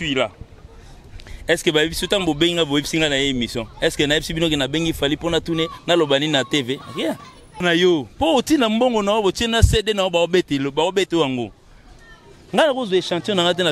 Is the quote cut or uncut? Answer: cut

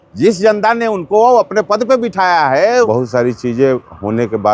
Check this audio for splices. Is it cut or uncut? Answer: cut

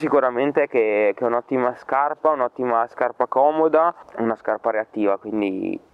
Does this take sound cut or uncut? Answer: cut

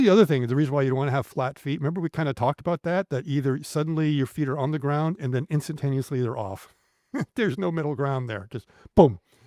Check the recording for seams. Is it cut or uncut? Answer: uncut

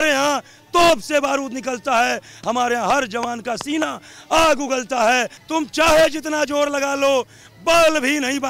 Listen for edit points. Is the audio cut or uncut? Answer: cut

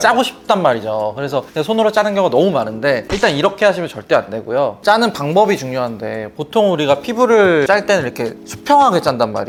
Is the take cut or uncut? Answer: uncut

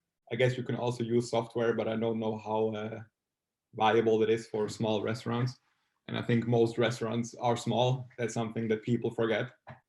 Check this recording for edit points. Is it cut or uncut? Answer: uncut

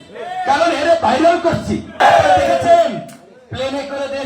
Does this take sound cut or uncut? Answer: cut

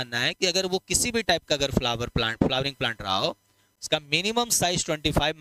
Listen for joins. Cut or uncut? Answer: uncut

